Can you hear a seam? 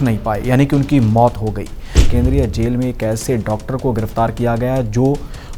yes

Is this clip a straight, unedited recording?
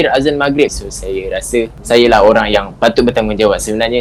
no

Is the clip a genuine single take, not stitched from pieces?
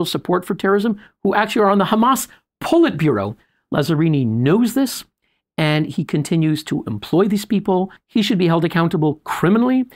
no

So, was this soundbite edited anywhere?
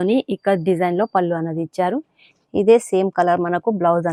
no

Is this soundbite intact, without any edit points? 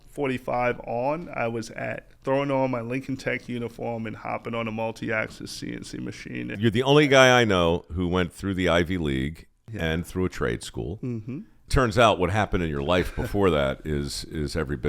no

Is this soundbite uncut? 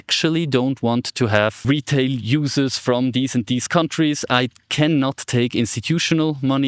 no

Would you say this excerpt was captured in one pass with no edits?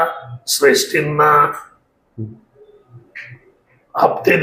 yes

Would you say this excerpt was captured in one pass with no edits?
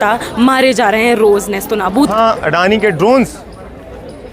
no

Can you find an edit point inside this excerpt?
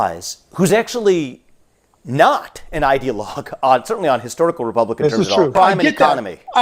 yes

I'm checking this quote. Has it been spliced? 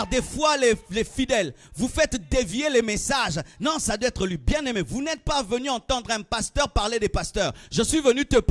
no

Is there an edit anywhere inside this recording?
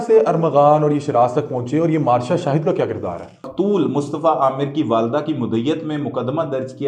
yes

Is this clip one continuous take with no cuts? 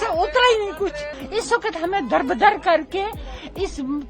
no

